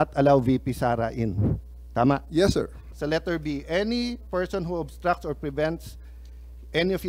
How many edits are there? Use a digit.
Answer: 1